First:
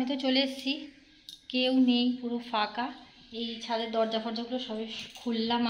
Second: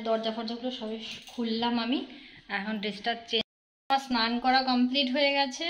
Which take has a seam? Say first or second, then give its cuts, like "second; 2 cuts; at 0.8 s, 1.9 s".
second; 1 cut; at 3.4 s